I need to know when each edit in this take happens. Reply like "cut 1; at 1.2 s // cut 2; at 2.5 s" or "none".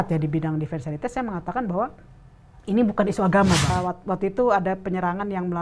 cut 1; at 3.7 s

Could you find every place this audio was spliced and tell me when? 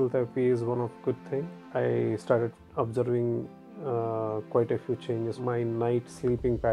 cut 1; at 1.7 s // cut 2; at 5.4 s

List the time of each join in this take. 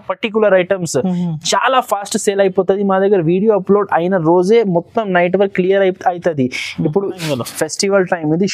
cut 1; at 7.2 s

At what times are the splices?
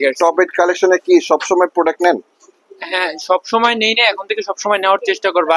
none

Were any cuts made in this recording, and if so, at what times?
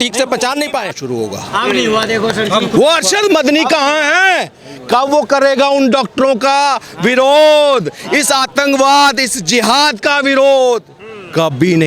cut 1; at 1.0 s

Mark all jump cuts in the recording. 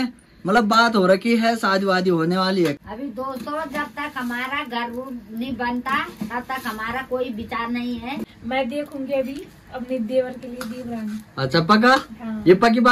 cut 1; at 2.8 s // cut 2; at 8.3 s

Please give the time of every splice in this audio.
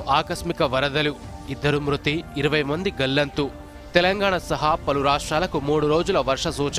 none

